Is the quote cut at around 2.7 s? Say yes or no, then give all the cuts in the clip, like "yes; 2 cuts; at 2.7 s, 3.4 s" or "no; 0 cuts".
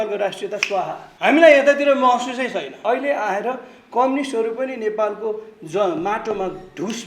yes; 2 cuts; at 1.0 s, 2.7 s